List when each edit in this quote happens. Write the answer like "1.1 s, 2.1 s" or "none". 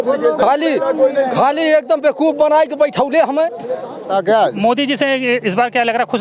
4.1 s